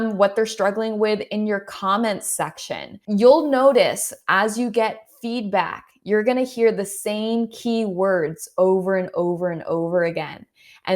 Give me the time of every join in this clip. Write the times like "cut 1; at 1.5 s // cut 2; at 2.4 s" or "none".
cut 1; at 2.9 s